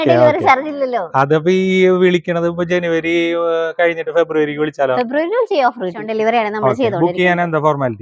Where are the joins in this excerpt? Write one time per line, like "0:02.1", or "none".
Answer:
0:06.0

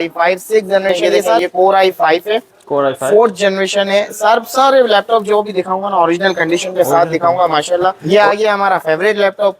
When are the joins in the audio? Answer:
0:01.4
0:08.0

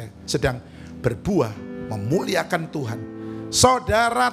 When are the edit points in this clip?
none

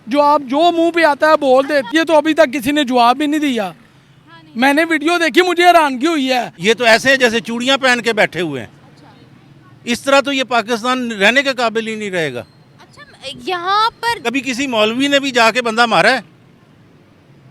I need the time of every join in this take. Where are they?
0:01.9
0:06.5
0:14.2

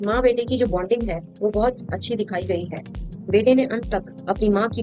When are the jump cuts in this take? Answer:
none

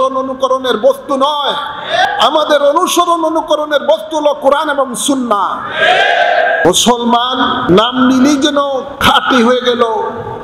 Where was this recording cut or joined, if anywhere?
0:02.0
0:06.6
0:07.7
0:08.9

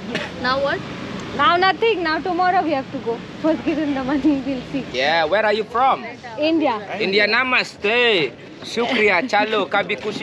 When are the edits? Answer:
0:04.9

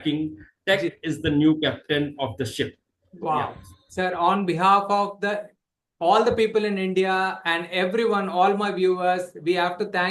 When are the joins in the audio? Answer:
0:03.6

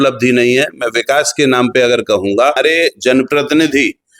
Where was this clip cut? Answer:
0:02.6

